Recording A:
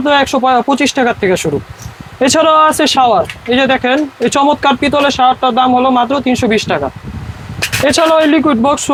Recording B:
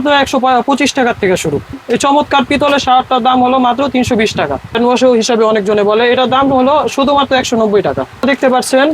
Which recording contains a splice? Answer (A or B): B